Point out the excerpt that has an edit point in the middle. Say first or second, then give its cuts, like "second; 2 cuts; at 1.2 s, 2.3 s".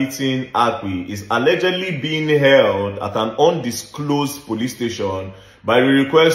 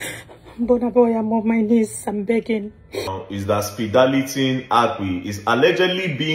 second; 1 cut; at 3.2 s